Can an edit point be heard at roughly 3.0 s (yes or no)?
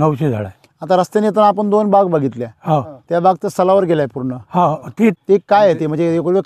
no